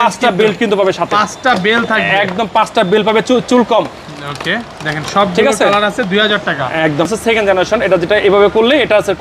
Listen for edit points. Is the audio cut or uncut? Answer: cut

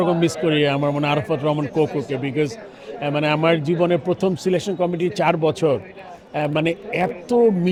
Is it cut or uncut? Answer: uncut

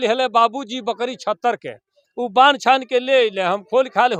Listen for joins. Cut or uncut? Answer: uncut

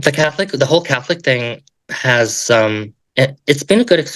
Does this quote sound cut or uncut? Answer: uncut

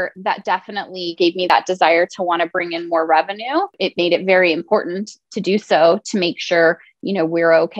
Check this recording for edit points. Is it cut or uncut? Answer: cut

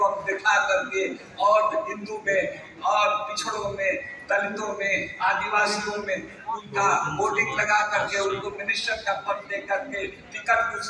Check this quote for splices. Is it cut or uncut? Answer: uncut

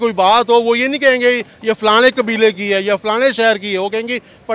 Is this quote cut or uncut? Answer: uncut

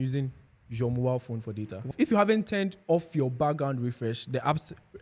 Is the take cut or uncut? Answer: cut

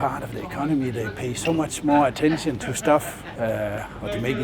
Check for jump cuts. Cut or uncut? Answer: cut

